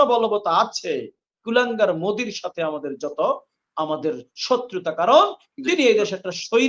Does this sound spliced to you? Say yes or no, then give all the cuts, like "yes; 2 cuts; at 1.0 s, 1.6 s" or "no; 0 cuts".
yes; 1 cut; at 1.4 s